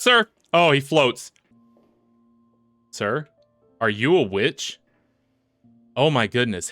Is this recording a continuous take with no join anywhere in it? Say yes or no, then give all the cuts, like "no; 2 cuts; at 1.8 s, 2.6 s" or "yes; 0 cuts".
no; 1 cut; at 1.3 s